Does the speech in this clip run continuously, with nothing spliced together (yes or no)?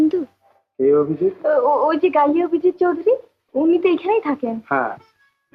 yes